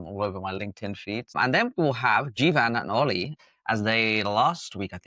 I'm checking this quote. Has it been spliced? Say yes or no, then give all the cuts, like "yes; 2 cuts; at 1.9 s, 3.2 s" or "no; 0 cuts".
yes; 2 cuts; at 1.4 s, 3.4 s